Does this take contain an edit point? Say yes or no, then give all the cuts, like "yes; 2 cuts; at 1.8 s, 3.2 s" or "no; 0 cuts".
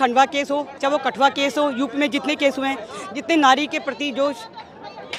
no; 0 cuts